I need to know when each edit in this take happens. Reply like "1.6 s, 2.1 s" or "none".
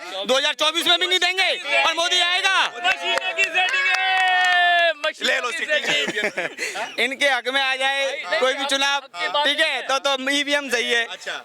none